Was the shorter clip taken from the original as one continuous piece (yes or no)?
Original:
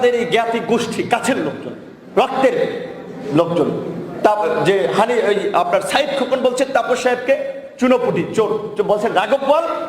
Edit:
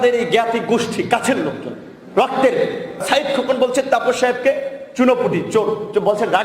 no